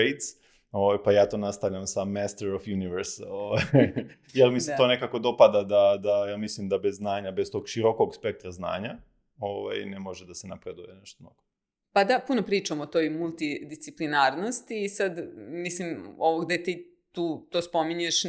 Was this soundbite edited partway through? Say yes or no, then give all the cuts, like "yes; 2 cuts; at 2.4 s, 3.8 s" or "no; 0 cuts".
no; 0 cuts